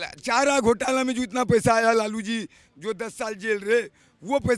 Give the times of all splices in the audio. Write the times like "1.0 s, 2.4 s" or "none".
none